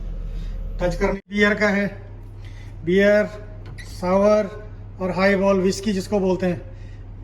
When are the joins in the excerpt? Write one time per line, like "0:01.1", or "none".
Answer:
0:01.2